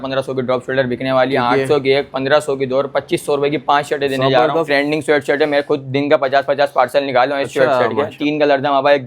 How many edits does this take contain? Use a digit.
2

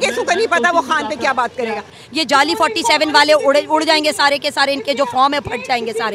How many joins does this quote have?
1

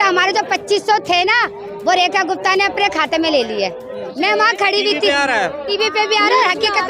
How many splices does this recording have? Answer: 1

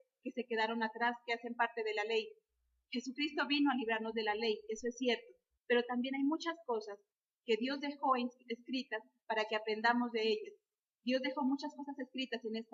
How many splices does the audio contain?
0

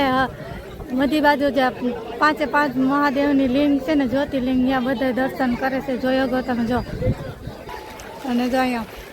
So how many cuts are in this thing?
1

